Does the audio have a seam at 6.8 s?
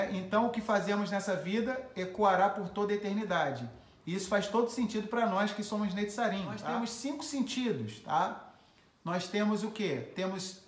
yes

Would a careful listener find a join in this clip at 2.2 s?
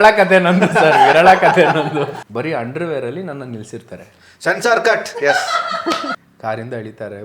yes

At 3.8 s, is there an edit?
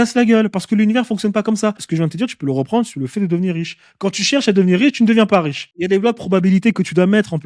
no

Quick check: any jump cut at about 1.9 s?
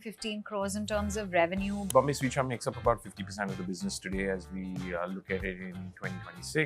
yes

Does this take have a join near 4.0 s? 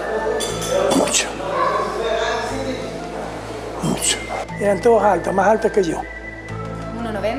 yes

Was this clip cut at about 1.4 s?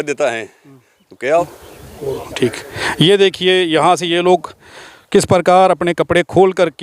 yes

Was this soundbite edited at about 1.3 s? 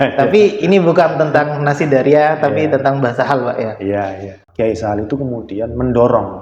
no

